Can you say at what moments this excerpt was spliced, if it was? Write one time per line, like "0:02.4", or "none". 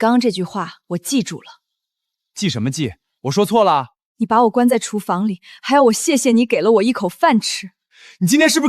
none

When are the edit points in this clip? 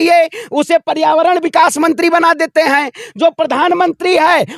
none

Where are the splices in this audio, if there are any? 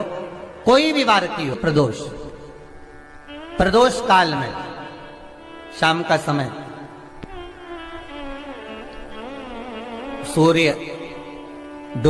0:01.6

